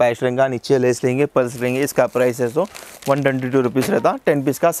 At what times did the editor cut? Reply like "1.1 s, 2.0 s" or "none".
none